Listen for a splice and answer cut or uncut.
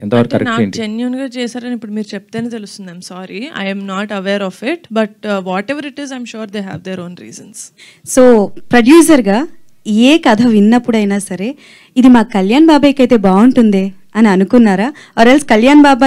cut